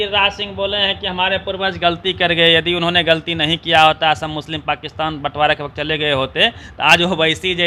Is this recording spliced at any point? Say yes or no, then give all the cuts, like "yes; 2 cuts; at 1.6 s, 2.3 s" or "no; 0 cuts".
no; 0 cuts